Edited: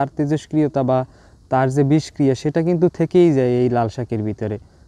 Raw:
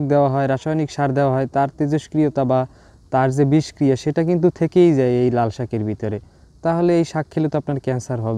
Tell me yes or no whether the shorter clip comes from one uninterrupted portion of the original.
yes